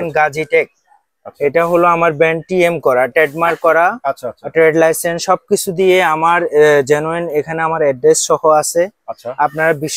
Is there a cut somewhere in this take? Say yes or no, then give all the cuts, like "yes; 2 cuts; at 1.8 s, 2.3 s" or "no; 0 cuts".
no; 0 cuts